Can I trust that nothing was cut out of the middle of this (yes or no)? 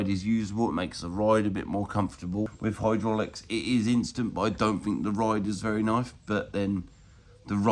no